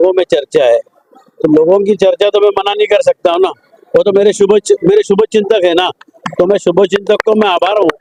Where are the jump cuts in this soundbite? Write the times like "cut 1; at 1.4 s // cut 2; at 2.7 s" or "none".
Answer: none